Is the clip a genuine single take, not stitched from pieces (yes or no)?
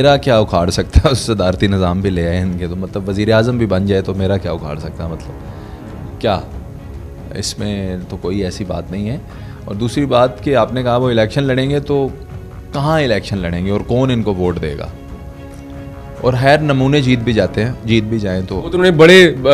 yes